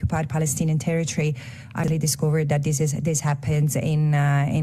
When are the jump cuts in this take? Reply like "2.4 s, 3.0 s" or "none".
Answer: 1.9 s